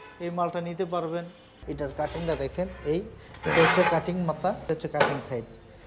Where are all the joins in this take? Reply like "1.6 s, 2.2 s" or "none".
1.5 s, 4.6 s

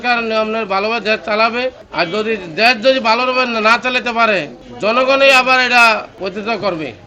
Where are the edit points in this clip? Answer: 1.8 s, 4.6 s, 6.1 s

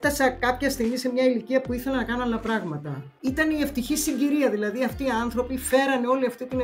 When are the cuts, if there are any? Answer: 3.1 s

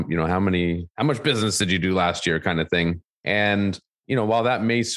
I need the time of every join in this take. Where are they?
3.9 s

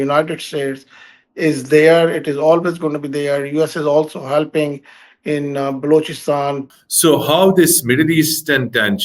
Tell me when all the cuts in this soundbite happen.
6.6 s

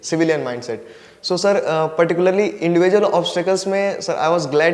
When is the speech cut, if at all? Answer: none

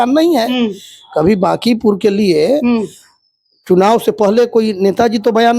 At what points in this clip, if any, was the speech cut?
none

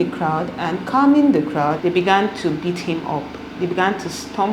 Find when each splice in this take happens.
1.8 s

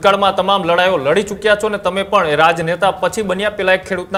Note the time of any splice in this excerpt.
none

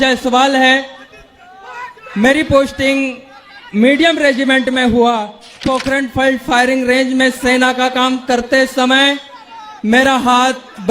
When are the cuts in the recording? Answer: 5.6 s

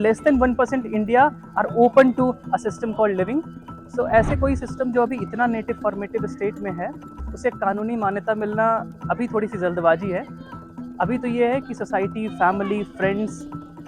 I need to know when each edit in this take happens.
none

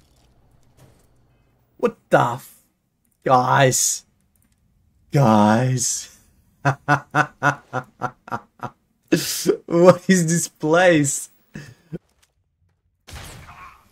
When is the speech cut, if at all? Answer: 12.0 s

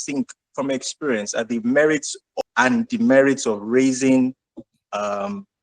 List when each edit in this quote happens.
2.2 s

